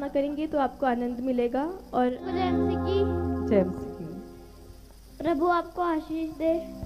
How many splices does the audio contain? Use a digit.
1